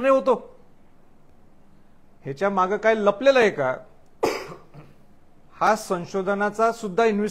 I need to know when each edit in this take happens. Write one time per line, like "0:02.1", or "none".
none

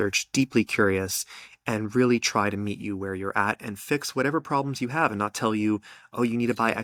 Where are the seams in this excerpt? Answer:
none

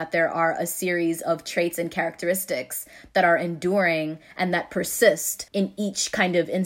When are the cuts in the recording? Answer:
0:05.4

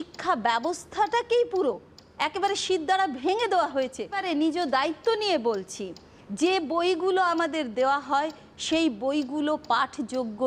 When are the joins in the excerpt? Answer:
0:04.2

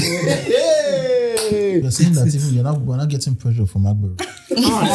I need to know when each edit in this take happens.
0:01.9

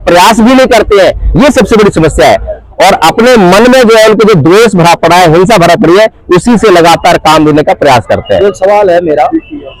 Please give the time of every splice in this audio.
none

